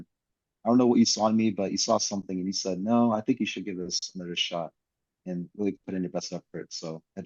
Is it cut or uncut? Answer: uncut